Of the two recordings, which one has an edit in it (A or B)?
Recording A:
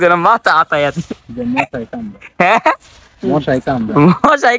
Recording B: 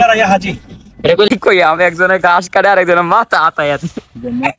B